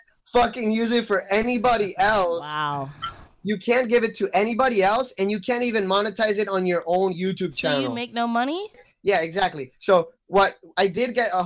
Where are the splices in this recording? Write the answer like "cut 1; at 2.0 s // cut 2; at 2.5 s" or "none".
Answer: cut 1; at 8.8 s